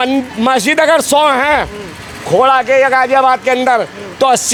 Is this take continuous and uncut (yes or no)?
yes